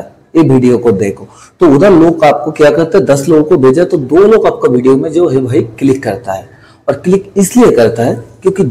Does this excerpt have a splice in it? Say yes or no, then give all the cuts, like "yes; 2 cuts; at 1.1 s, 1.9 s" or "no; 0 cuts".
no; 0 cuts